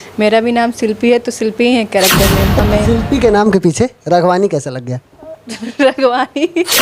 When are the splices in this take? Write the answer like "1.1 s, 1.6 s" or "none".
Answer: 2.6 s